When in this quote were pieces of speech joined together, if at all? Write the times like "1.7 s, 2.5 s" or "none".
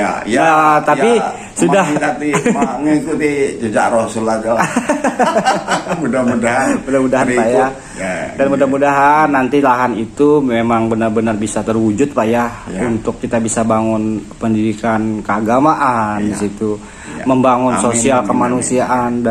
none